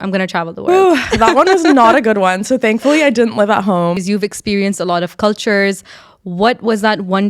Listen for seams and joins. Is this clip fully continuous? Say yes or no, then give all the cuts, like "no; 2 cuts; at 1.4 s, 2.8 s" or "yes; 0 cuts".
no; 1 cut; at 4.0 s